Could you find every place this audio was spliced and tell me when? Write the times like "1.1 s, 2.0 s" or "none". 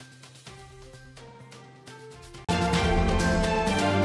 none

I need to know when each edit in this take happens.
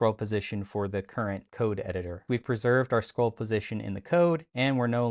2.2 s

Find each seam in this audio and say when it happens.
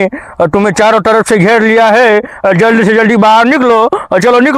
none

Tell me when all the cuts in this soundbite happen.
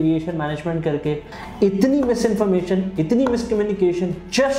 1.3 s

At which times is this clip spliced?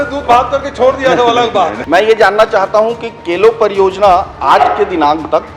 1.8 s

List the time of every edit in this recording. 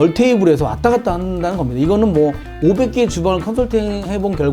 none

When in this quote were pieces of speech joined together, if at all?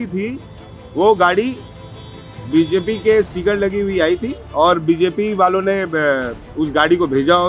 none

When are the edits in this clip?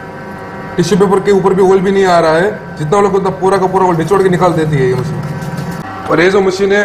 none

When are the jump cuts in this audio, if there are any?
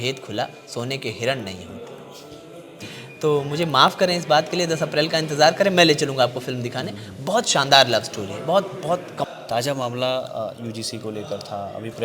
2.8 s, 9.3 s

